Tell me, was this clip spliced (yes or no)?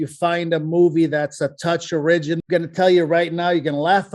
yes